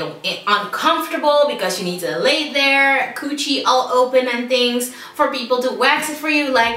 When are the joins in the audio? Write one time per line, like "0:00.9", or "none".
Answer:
none